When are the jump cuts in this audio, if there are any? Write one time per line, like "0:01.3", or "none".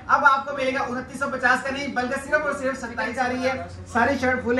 0:03.1